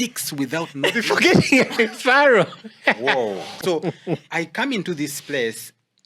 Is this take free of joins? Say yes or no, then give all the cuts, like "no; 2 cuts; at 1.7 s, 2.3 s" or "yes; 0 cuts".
no; 1 cut; at 3.6 s